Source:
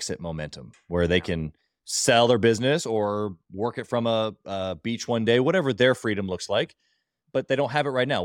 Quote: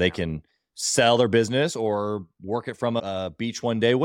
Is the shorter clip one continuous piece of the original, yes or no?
no